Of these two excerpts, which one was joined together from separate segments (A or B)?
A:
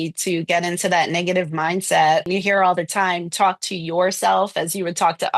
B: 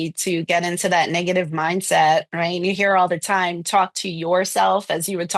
A